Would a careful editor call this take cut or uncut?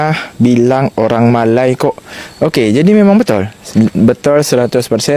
uncut